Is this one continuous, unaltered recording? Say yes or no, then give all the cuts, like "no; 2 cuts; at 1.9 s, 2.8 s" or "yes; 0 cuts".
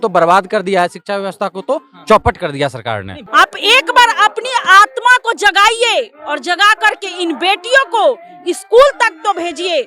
no; 1 cut; at 3.1 s